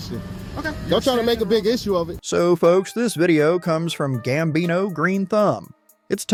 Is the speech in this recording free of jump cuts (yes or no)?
yes